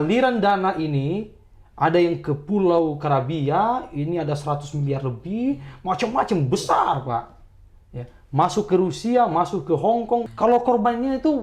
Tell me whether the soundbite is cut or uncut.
cut